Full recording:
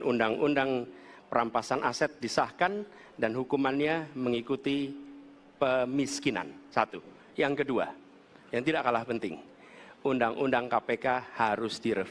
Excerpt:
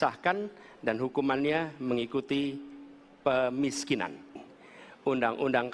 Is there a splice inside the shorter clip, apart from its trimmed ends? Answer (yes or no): yes